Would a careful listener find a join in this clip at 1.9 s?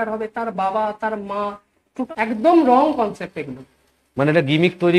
yes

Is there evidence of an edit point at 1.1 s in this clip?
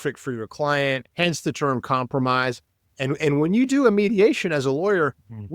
yes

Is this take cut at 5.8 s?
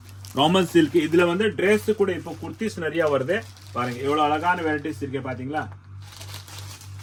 no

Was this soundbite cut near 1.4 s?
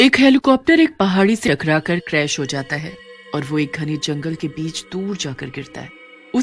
yes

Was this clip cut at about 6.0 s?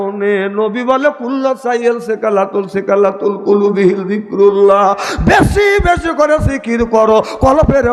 no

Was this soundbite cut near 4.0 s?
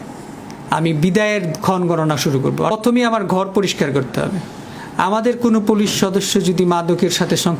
no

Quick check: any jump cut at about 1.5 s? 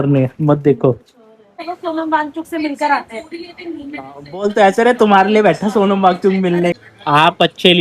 yes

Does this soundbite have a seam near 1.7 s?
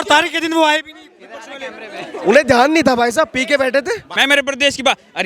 no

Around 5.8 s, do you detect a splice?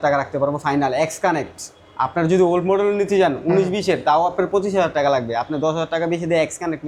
no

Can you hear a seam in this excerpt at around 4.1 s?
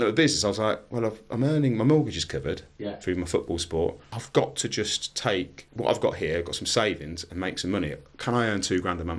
yes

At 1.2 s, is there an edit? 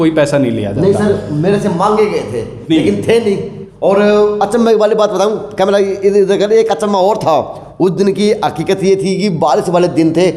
no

